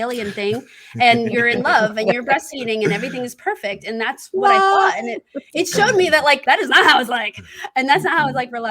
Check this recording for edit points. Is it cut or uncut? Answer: cut